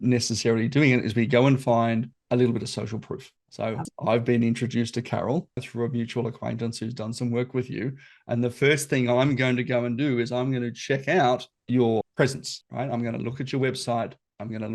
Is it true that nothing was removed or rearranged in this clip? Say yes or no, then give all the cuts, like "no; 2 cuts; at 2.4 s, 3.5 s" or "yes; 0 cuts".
no; 1 cut; at 12.0 s